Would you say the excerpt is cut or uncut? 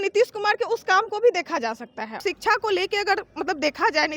cut